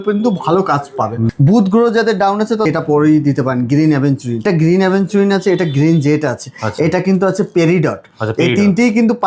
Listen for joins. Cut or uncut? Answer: cut